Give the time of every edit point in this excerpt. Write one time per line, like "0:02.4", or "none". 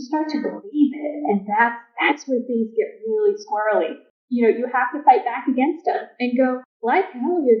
0:04.0
0:06.7